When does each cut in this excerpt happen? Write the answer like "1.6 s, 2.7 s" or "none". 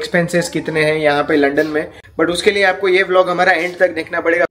2.0 s